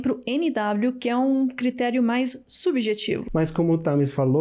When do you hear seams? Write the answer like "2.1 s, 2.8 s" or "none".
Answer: 3.1 s